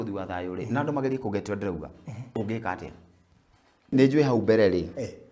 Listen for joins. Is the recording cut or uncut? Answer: cut